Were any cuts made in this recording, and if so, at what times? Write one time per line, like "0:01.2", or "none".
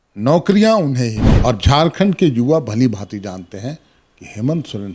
0:01.3